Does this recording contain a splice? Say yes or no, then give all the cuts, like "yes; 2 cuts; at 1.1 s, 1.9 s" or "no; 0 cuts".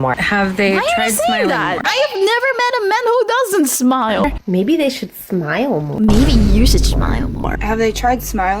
yes; 2 cuts; at 4.2 s, 7.5 s